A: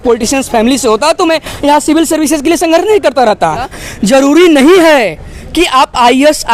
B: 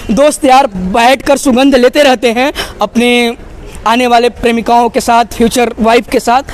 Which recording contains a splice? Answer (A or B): A